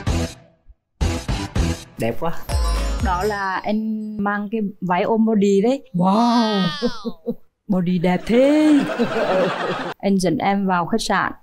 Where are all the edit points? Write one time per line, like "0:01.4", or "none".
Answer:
0:02.5
0:04.2
0:09.8